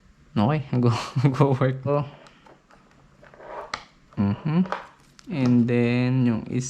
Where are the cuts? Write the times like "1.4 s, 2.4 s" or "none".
1.9 s